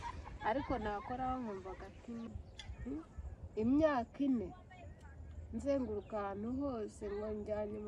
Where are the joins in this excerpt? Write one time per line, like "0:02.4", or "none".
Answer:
0:02.3